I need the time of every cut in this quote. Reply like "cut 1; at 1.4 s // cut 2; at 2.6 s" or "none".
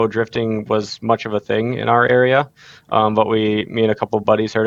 none